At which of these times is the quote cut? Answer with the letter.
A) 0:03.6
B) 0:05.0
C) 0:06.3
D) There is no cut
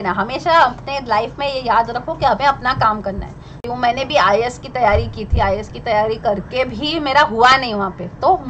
A